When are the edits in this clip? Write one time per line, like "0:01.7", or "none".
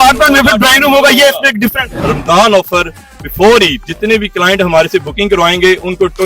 0:02.1
0:03.9